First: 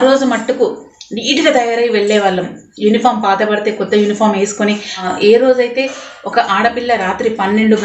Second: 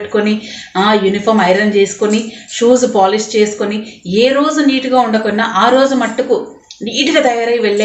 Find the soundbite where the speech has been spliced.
first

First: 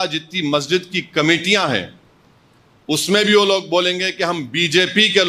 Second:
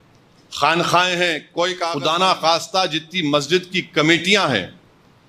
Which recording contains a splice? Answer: second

